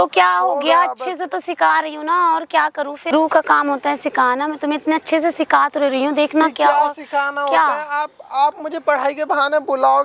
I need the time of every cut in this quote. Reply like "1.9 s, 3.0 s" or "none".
none